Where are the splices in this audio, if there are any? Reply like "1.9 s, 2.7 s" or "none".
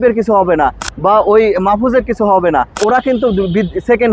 2.8 s